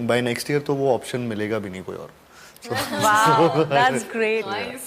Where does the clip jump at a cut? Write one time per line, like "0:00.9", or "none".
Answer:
none